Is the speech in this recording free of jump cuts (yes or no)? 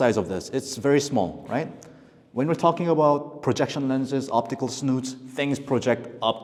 yes